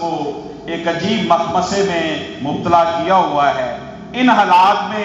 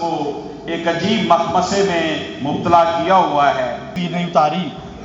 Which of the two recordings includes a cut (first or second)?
second